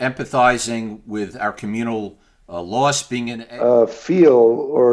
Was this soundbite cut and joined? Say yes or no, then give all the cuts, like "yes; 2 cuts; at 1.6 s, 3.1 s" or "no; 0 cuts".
yes; 1 cut; at 3.4 s